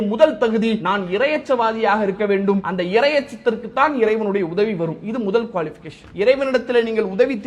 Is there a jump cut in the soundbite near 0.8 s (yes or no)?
yes